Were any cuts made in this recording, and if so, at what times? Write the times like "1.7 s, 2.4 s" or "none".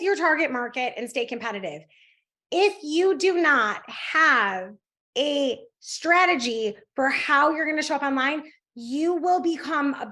none